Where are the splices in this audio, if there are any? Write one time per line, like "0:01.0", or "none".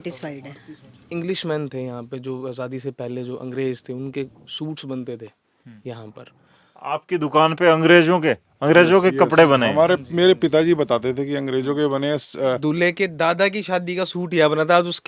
0:01.1
0:12.6

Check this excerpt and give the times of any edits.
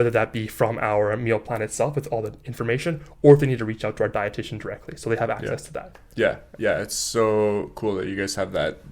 none

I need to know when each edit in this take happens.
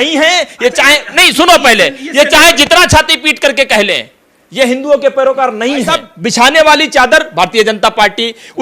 0:06.1

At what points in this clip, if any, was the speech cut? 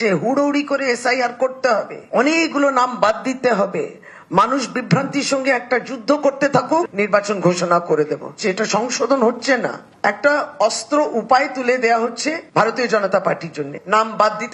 none

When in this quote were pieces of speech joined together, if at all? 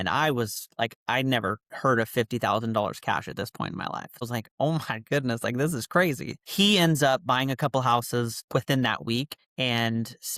0:04.2
0:09.4

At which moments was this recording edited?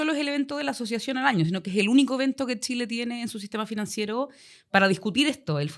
none

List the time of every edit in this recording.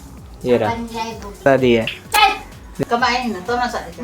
0:01.5
0:02.6

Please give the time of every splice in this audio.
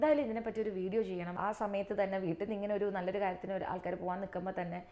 0:01.4

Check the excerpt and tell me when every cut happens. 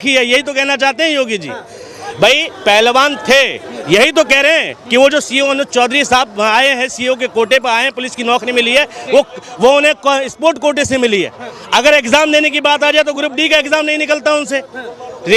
none

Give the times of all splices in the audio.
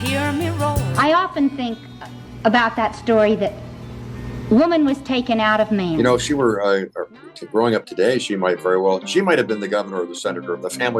0:00.9
0:06.0

